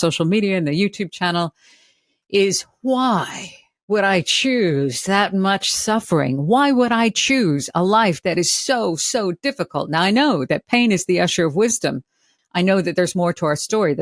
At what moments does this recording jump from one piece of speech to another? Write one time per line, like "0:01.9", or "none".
0:12.3